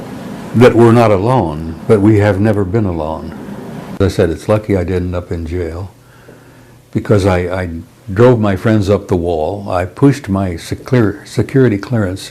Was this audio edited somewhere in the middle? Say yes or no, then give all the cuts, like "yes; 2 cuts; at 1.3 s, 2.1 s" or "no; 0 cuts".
yes; 1 cut; at 4.0 s